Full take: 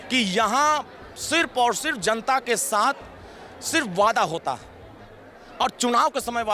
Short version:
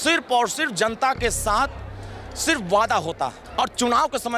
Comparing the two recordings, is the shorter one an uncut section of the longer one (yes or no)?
no